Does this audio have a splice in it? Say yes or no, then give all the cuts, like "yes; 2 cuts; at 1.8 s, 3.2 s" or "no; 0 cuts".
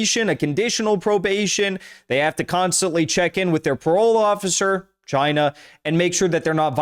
no; 0 cuts